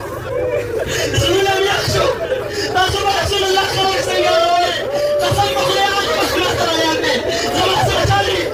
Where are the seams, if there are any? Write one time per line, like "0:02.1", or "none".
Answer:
none